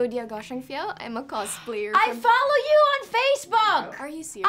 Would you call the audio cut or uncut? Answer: uncut